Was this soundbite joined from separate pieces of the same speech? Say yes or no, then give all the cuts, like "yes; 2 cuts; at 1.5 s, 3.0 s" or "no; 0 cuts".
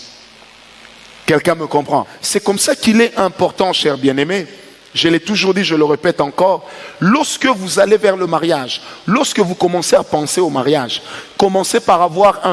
yes; 1 cut; at 2.2 s